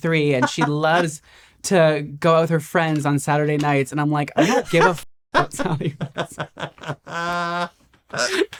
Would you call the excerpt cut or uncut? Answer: uncut